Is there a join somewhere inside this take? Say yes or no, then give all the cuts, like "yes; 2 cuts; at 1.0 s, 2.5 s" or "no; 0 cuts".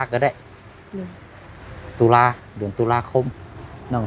no; 0 cuts